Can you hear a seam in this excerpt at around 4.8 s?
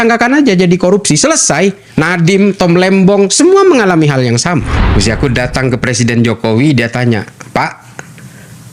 yes; 1 cut; at 4.8 s

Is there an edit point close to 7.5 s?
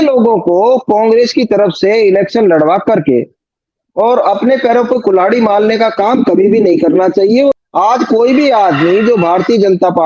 yes; 1 cut; at 7.5 s

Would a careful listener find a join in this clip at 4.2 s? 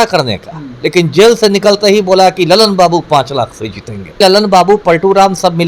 yes; 1 cut; at 4.2 s

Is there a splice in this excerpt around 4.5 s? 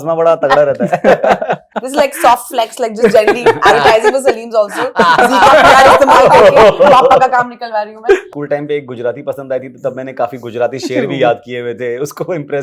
no; 2 cuts; at 1.8 s, 8.3 s

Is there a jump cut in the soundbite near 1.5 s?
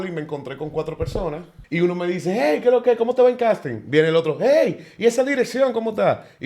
yes; 1 cut; at 1.5 s

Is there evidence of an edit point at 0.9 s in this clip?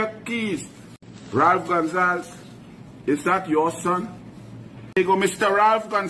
no; 1 cut; at 4.8 s

